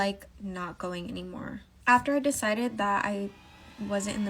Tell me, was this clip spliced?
yes; 1 cut; at 1.7 s

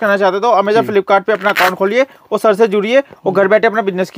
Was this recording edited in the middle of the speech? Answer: no; 0 cuts

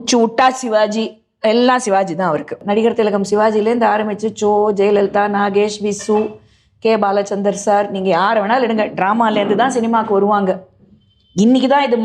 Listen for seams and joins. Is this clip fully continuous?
no; 1 cut; at 2.6 s

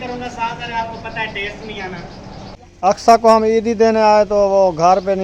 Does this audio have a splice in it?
yes; 1 cut; at 3.0 s

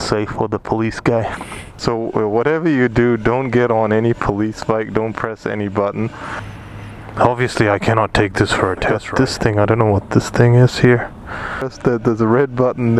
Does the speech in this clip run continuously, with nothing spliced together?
no; 4 cuts; at 1.8 s, 6.7 s, 9.0 s, 11.7 s

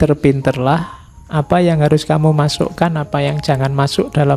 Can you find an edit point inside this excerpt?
no; 0 cuts

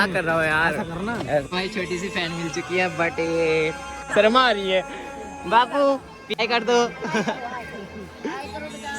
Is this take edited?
yes; 3 cuts; at 1.4 s, 4.0 s, 6.4 s

